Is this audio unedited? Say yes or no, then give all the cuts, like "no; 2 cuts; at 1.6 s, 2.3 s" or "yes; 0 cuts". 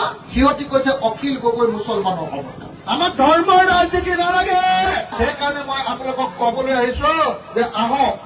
no; 2 cuts; at 2.6 s, 5.1 s